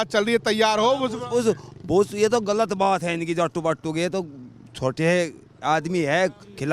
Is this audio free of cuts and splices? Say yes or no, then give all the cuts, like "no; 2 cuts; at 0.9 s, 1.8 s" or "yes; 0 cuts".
yes; 0 cuts